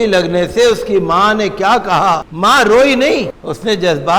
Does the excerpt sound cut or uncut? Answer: cut